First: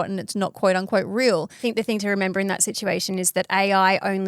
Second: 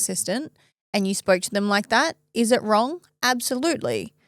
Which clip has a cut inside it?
first; 1 cut; at 1.6 s

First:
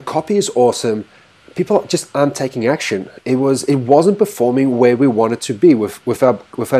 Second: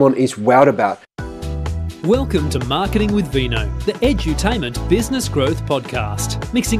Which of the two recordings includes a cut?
second; 1 cut; at 1.1 s

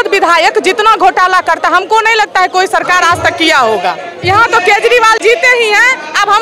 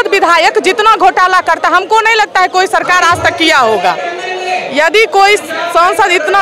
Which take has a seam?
first; 1 cut; at 4.1 s

